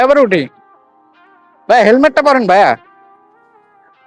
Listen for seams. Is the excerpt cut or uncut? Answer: cut